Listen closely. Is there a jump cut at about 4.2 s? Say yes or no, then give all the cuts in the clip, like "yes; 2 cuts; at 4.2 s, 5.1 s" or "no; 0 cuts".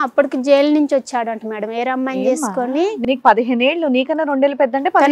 no; 0 cuts